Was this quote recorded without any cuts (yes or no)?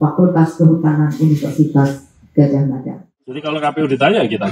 no